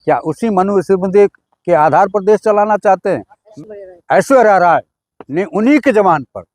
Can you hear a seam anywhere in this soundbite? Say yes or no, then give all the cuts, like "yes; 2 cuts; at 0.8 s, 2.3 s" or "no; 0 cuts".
yes; 1 cut; at 3.5 s